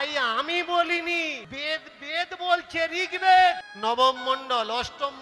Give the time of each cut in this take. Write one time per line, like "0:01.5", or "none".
0:01.5
0:03.7